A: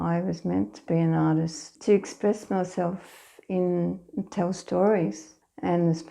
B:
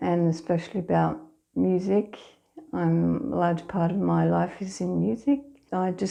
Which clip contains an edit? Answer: A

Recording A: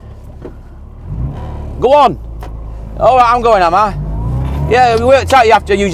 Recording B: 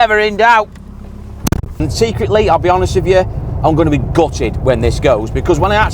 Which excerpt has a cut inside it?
B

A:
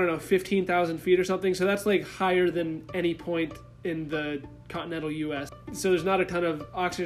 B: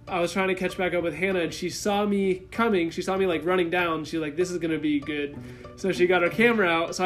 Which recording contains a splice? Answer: A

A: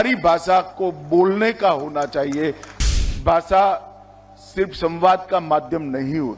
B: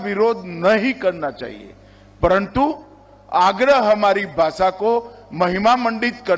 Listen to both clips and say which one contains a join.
A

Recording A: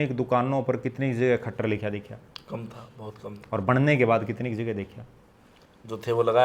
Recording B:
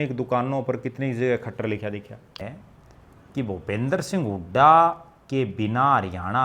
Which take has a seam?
B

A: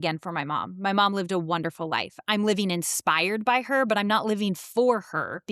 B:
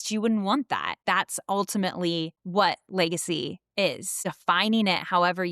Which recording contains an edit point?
B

